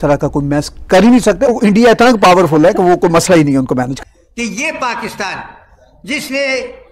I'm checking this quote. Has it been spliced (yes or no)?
yes